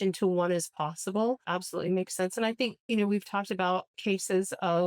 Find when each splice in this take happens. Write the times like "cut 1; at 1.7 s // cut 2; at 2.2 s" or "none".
cut 1; at 1.4 s // cut 2; at 3.9 s

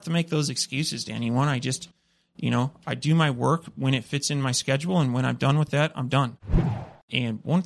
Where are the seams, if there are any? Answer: cut 1; at 6.7 s

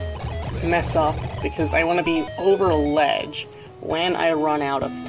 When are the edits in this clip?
none

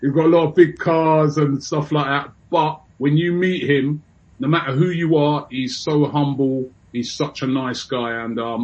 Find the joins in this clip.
cut 1; at 2.9 s // cut 2; at 6.8 s

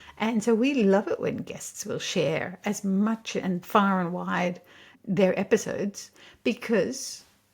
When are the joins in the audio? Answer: cut 1; at 4.9 s

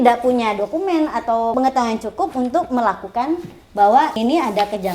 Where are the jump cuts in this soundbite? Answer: cut 1; at 1.5 s // cut 2; at 4.2 s

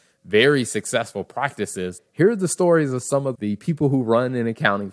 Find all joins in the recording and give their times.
cut 1; at 2.0 s // cut 2; at 3.3 s

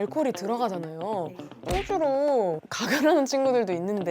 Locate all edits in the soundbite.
cut 1; at 1.5 s

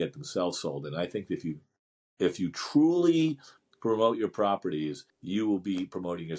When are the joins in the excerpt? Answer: cut 1; at 5.1 s

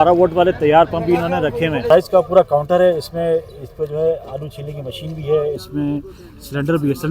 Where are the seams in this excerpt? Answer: cut 1; at 1.8 s

